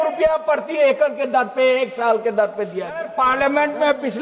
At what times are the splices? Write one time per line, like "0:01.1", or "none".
0:03.1